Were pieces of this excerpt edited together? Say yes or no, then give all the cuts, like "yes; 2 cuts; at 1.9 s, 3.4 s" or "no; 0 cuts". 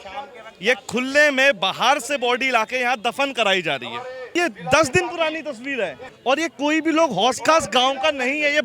yes; 2 cuts; at 4.3 s, 6.1 s